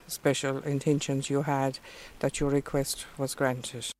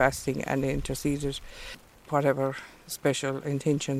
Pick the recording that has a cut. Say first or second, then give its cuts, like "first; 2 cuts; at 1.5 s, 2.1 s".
second; 1 cut; at 1.9 s